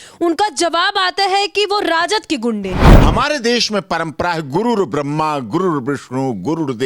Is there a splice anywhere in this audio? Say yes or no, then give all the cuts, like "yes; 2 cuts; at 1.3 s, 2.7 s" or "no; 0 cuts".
yes; 1 cut; at 2.9 s